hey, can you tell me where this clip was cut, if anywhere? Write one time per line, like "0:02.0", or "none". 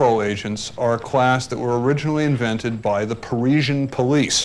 none